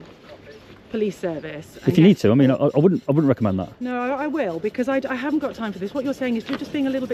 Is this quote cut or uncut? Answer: uncut